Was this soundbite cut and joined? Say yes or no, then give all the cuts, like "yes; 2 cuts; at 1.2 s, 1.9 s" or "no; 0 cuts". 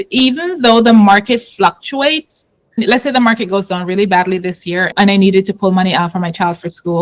yes; 2 cuts; at 2.8 s, 4.9 s